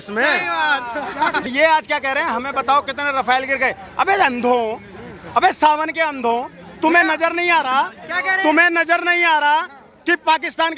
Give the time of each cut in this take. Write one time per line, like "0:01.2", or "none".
0:01.5